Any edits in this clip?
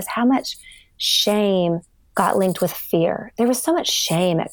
yes; 1 cut; at 2.0 s

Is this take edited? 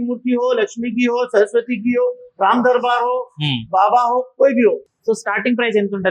yes; 1 cut; at 4.9 s

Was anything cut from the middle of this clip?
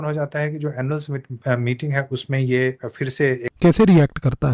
yes; 1 cut; at 3.5 s

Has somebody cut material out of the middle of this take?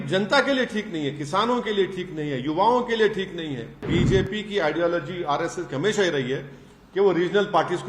yes; 1 cut; at 3.8 s

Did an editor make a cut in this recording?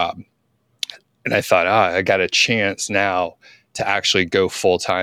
no; 0 cuts

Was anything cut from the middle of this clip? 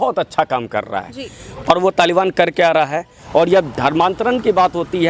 yes; 1 cut; at 3.1 s

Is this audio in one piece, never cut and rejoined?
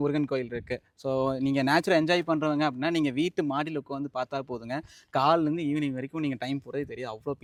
yes; 0 cuts

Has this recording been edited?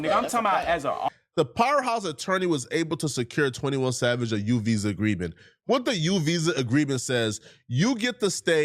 yes; 1 cut; at 1.1 s

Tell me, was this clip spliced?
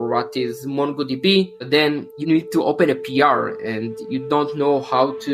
no; 0 cuts

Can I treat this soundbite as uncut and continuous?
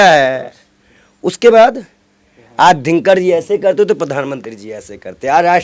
yes; 0 cuts

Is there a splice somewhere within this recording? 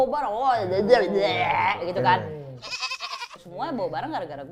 no; 0 cuts

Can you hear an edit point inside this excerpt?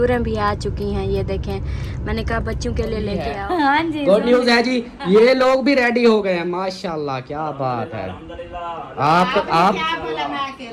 yes; 1 cut; at 3.3 s

